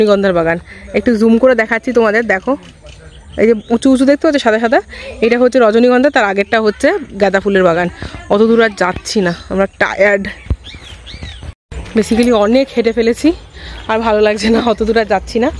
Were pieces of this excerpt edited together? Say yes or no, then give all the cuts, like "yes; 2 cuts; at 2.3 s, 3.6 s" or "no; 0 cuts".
no; 0 cuts